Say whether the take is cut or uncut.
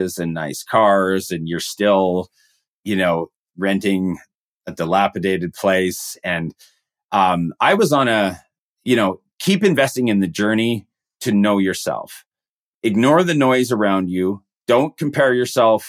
uncut